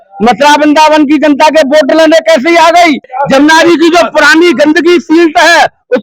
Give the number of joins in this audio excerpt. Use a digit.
1